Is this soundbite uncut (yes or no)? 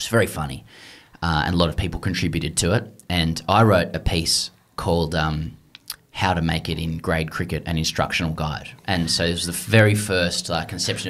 yes